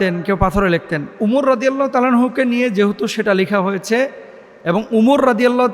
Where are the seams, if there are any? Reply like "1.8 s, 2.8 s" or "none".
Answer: 1.2 s